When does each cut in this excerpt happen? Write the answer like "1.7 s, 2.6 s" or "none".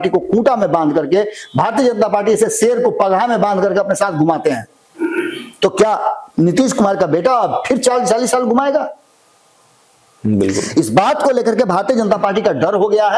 none